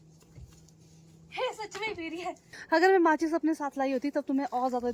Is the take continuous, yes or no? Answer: no